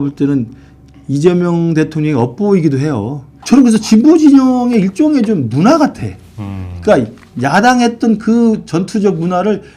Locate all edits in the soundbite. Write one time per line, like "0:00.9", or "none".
0:03.3